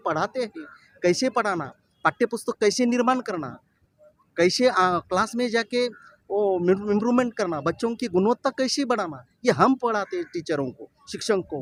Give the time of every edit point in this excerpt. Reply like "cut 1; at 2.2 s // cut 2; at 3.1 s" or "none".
none